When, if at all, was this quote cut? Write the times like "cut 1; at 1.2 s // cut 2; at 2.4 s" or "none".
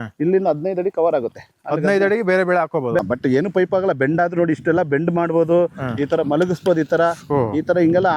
cut 1; at 3.0 s

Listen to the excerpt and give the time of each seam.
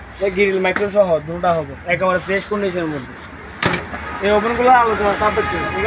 none

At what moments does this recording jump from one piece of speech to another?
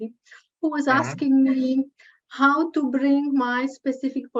none

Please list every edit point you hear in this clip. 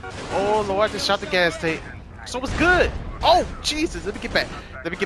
none

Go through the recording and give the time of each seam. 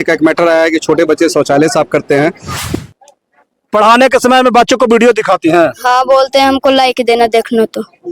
cut 1; at 2.7 s

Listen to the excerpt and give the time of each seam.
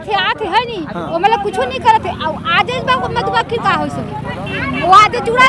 none

